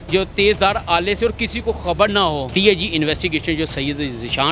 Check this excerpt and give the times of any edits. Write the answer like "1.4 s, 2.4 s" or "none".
2.5 s